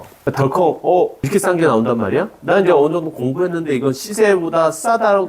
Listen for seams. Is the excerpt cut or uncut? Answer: uncut